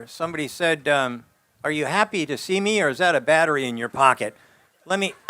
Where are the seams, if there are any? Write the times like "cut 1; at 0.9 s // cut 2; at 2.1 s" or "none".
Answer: none

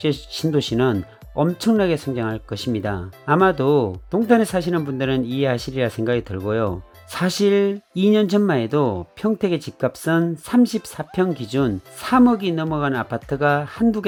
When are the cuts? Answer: none

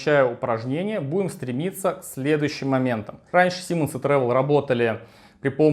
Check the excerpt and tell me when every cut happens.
cut 1; at 3.2 s

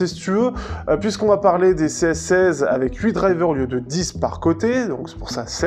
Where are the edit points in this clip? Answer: none

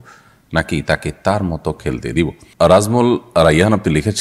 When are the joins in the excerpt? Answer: cut 1; at 2.4 s

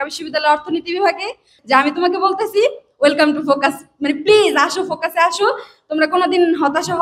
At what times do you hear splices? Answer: cut 1; at 1.5 s

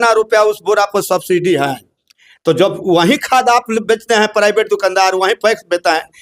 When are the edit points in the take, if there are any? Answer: none

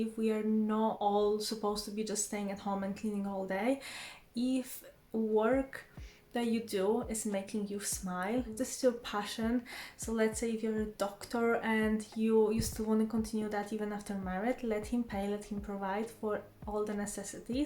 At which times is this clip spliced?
cut 1; at 1.0 s // cut 2; at 8.5 s

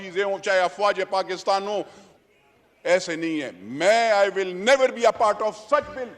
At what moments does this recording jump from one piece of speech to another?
cut 1; at 2.0 s

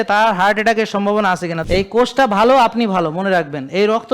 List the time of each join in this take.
cut 1; at 1.6 s

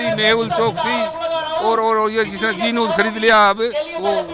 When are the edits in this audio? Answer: none

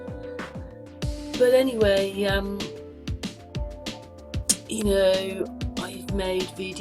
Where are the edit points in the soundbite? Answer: cut 1; at 1.4 s

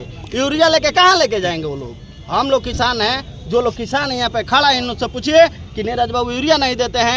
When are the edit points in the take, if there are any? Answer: none

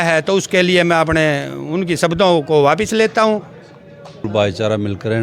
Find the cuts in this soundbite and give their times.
cut 1; at 4.2 s

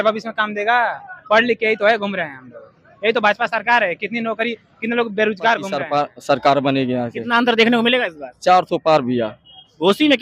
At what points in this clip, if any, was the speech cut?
cut 1; at 5.8 s

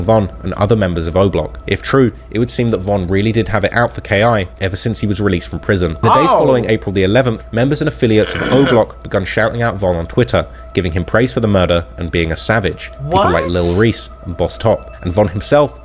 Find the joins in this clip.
cut 1; at 6.0 s

